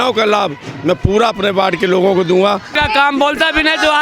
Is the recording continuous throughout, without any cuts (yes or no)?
no